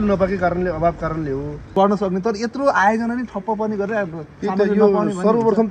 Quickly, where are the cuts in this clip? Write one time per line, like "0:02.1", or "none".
0:01.7